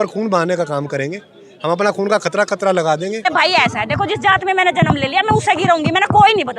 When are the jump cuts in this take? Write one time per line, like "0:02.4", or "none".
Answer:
0:03.3

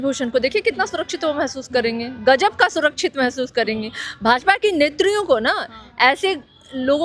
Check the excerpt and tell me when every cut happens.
none

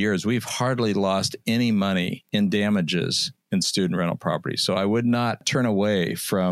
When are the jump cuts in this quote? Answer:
0:02.2
0:05.4

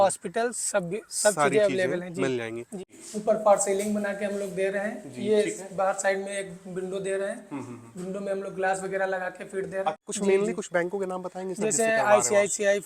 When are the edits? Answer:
0:02.7
0:10.1

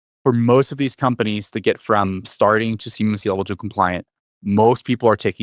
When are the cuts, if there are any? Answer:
none

